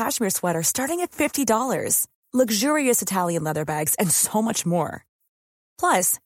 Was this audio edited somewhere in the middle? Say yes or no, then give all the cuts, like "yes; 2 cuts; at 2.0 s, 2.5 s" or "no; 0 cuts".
no; 0 cuts